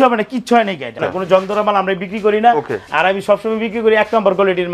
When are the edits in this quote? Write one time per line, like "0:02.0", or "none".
0:01.1

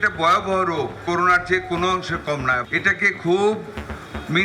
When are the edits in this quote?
none

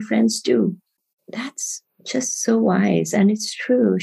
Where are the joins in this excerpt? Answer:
0:01.0

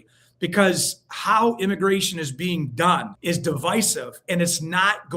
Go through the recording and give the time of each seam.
0:03.1

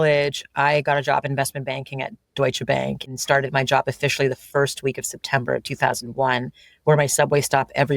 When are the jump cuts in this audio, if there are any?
0:03.1

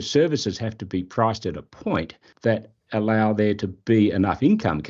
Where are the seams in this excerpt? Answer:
0:02.2

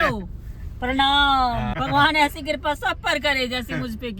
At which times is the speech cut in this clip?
0:01.7

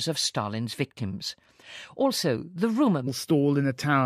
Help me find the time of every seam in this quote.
none

